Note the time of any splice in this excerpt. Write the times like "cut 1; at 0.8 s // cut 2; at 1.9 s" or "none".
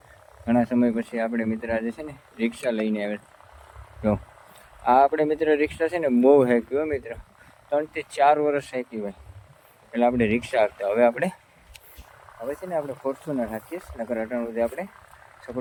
none